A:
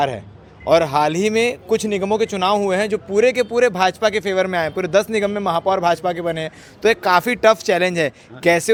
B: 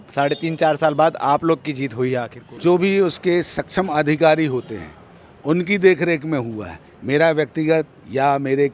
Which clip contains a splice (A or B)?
B